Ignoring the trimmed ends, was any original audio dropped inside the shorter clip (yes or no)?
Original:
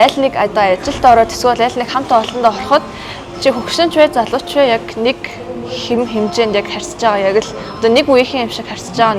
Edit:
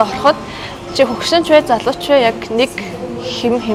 no